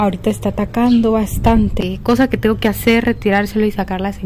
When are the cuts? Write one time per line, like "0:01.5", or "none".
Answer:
0:01.8